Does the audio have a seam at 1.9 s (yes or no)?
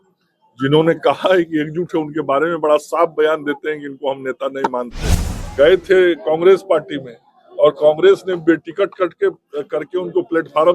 no